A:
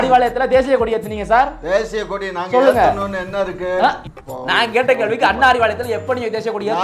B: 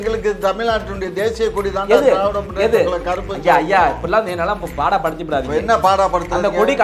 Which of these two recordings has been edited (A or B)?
A